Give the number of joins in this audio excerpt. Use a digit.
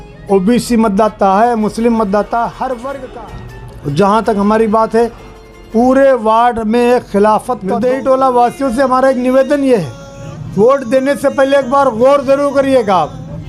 2